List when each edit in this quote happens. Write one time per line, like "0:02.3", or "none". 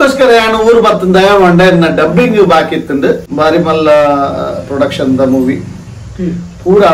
0:03.3